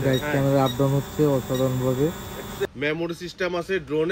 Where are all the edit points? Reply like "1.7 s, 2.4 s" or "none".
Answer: 2.6 s